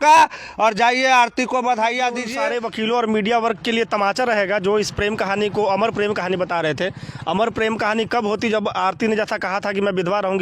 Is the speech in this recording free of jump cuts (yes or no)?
no